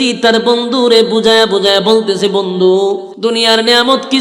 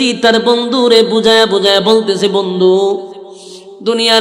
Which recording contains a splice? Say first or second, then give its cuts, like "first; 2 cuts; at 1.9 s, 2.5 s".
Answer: first; 1 cut; at 3.1 s